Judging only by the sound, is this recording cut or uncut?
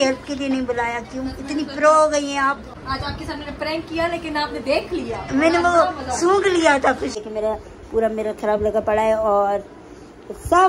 cut